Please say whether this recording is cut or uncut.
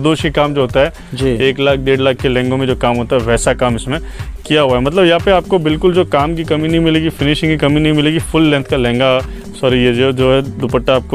uncut